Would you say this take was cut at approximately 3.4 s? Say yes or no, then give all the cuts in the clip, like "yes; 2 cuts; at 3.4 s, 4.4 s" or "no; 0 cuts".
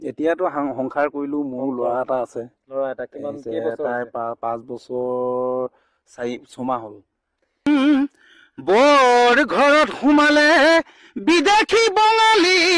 no; 1 cut; at 7.7 s